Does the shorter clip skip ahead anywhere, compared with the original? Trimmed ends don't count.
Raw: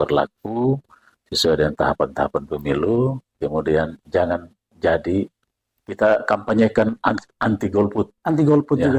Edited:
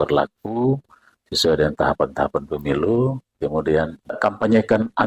yes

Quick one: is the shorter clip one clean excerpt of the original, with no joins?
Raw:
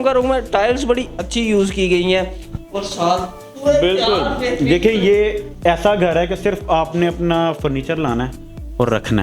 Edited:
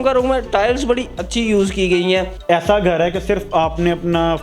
no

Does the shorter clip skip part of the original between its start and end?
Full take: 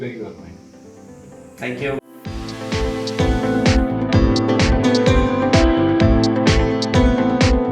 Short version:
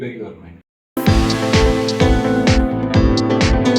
yes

